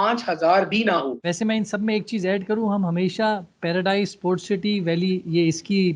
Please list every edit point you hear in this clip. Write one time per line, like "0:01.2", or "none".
0:01.2